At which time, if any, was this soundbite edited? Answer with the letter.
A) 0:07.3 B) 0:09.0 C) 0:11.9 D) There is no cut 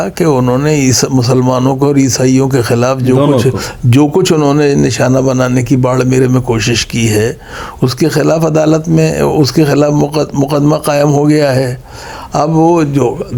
D